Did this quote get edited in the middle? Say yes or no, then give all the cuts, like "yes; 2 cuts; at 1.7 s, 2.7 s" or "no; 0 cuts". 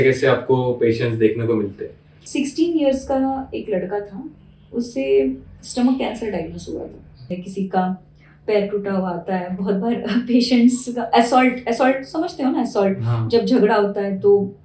yes; 2 cuts; at 2.2 s, 7.3 s